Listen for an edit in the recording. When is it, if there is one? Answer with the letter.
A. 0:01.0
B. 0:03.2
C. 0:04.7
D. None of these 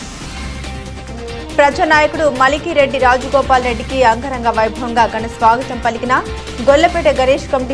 A